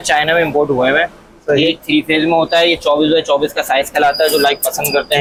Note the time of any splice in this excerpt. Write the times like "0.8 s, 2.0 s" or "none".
none